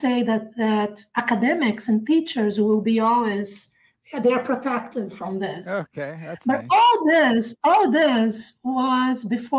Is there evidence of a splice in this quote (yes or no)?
no